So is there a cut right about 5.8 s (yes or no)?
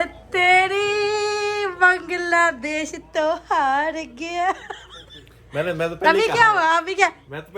yes